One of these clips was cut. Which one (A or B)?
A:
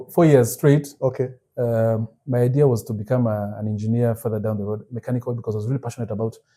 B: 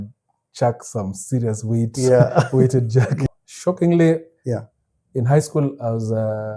B